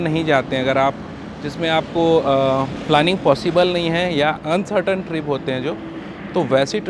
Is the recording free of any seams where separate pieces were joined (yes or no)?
yes